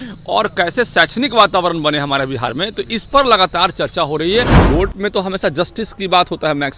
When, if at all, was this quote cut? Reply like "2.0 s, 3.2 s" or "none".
4.6 s